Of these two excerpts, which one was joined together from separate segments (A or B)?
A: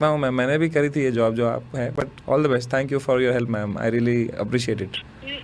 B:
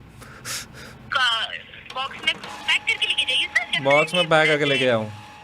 B